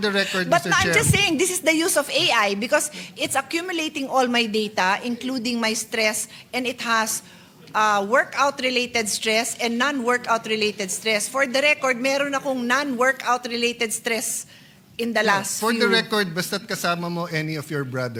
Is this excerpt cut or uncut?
uncut